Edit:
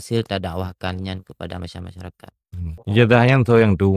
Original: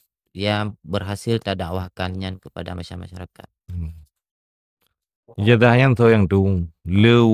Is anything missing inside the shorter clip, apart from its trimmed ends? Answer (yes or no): yes